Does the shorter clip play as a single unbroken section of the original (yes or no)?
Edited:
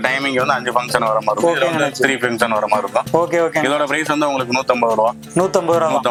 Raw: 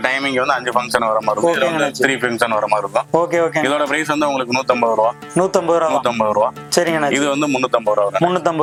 yes